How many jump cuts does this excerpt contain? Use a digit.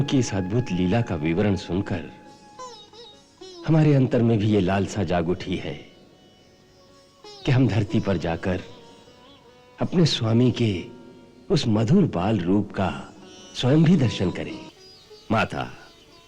1